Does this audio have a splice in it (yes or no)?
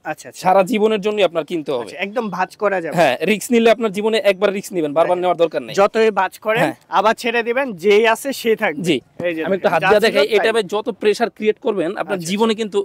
no